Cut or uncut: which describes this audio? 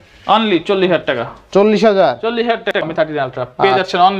cut